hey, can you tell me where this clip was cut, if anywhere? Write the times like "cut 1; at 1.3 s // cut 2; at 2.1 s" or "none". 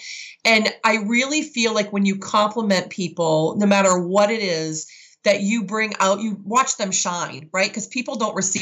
none